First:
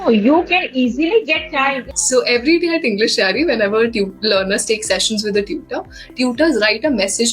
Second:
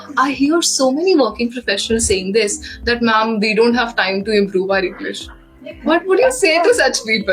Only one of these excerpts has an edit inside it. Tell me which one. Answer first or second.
first